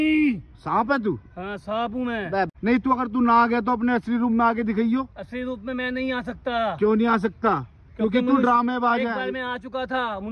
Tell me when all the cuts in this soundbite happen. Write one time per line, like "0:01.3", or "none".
0:02.5